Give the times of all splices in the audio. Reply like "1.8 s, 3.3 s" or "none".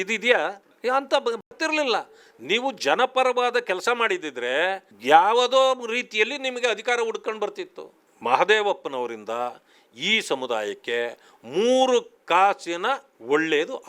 none